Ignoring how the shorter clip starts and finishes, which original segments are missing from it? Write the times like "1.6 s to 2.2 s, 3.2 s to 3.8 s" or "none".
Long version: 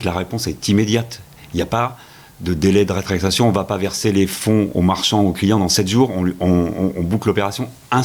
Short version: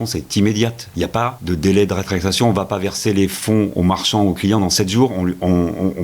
1.4 s to 2.0 s